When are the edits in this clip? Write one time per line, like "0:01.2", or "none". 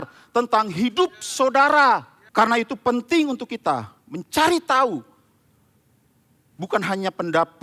0:02.2

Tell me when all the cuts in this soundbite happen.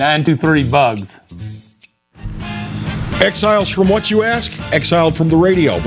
0:01.9

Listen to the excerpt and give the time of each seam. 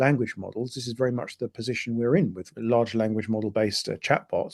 0:02.5

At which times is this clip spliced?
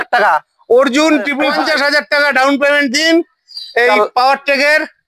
0:01.5

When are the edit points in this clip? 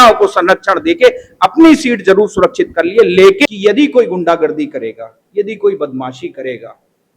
0:03.4

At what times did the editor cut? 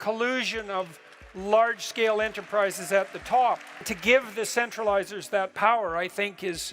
0:03.7

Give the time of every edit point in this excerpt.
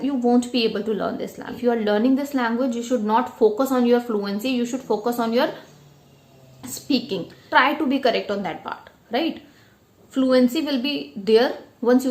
0:01.5
0:07.4

